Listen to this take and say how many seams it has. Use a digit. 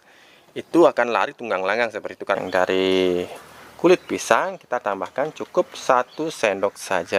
1